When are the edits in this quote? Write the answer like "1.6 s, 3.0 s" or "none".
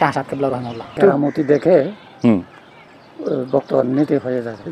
1.0 s